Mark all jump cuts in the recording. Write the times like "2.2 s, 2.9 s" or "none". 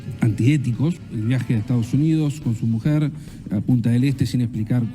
1.0 s